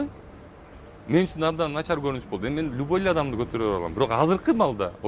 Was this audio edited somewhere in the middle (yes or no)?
no